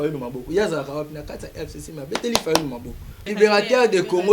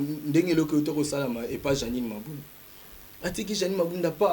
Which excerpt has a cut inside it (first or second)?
first